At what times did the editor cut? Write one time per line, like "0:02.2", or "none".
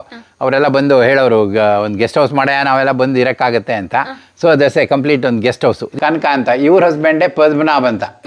0:05.9

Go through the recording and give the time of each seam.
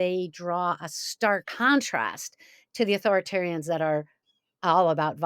0:01.5

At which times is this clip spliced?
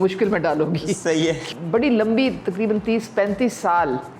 0:01.5

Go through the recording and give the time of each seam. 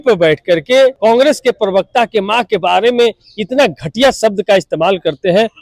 0:01.0

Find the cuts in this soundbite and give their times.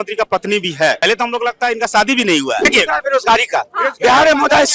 0:01.0
0:02.7

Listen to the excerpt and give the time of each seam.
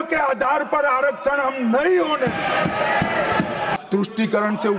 0:03.7

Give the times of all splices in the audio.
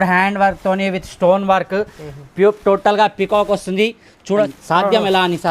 0:04.5

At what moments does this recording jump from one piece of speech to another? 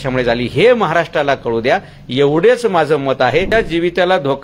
0:03.5

